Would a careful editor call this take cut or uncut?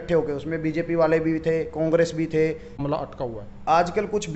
cut